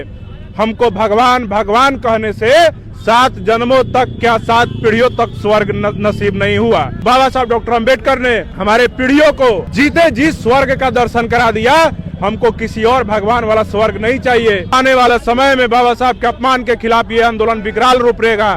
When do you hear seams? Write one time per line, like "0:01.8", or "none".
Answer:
0:07.0
0:08.5
0:09.7
0:14.7